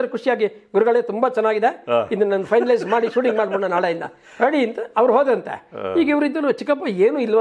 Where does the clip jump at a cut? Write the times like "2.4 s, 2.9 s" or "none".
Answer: none